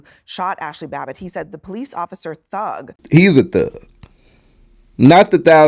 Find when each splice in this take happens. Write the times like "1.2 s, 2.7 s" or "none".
3.0 s